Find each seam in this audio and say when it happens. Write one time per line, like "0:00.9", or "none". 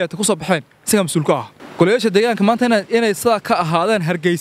0:01.6